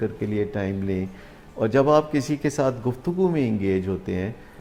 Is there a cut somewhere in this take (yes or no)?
no